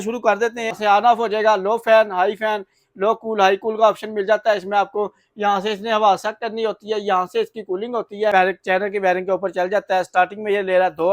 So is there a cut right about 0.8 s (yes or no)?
yes